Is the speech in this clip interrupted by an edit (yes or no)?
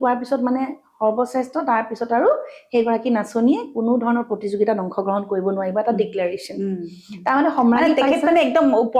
no